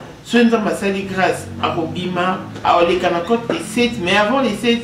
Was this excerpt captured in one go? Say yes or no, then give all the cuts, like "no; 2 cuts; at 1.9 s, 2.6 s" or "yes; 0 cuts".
no; 1 cut; at 2.6 s